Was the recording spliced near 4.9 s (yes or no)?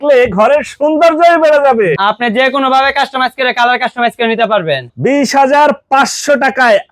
yes